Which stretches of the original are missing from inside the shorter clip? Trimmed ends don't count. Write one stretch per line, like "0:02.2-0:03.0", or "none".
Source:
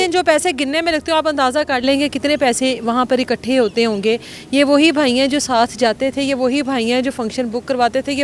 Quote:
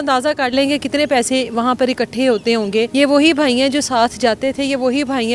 0:04.2-0:04.5